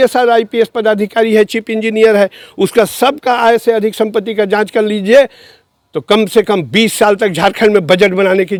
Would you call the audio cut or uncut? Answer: uncut